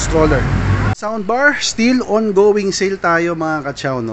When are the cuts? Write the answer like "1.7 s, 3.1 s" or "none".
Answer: 0.9 s